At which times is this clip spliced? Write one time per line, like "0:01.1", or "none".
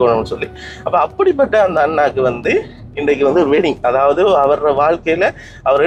none